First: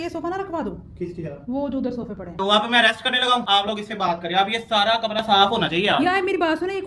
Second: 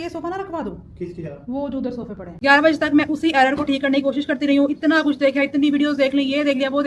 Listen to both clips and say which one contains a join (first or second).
second